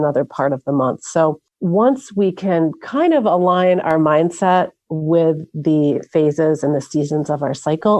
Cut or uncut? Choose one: cut